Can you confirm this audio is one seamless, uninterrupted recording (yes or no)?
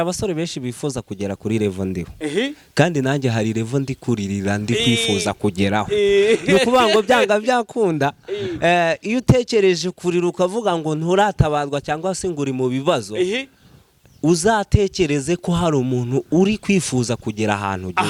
yes